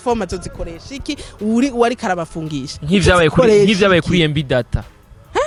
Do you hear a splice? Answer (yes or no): no